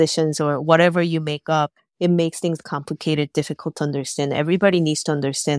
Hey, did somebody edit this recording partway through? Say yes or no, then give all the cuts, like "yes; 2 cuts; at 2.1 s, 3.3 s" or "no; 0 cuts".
no; 0 cuts